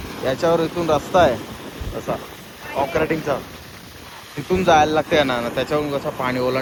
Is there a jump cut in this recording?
no; 0 cuts

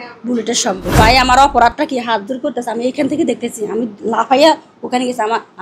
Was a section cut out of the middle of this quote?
yes; 1 cut; at 0.9 s

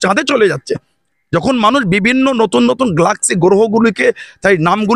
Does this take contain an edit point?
no; 0 cuts

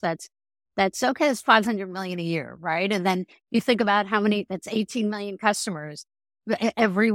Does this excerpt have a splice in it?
no; 0 cuts

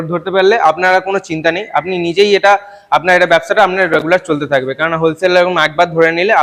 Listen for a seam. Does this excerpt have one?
no; 0 cuts

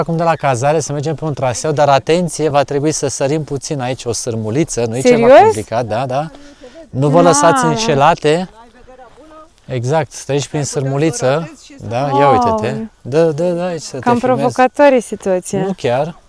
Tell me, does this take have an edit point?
no; 0 cuts

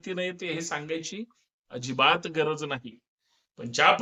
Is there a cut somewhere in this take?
no; 0 cuts

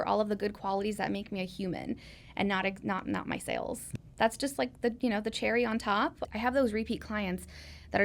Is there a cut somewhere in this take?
yes; 2 cuts; at 3.9 s, 6.2 s

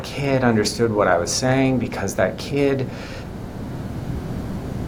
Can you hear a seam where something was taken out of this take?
no; 0 cuts

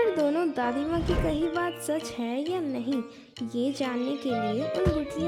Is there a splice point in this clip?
no; 0 cuts

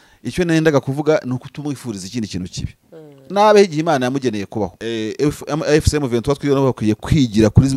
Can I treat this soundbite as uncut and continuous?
no; 1 cut; at 4.8 s

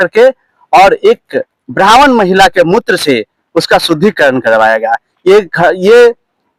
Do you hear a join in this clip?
no; 0 cuts

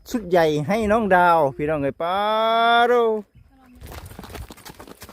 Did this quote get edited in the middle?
yes; 1 cut; at 3.8 s

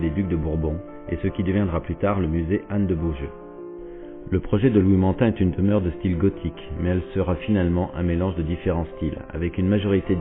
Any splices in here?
yes; 1 cut; at 2.9 s

